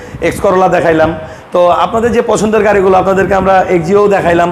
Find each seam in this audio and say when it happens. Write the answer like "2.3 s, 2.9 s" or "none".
none

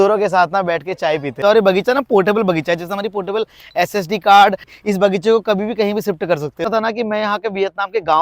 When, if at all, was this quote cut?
1.4 s, 4.7 s, 6.7 s

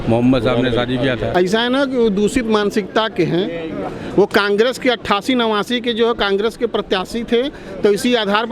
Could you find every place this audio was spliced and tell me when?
1.3 s

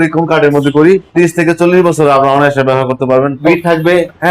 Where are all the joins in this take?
1.1 s, 3.4 s

